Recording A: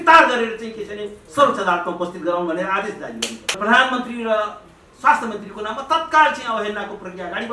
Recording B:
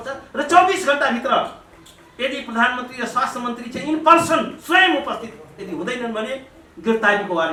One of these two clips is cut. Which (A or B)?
A